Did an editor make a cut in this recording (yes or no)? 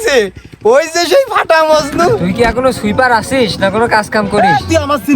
yes